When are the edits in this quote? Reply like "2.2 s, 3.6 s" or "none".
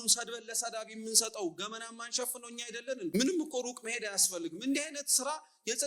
3.1 s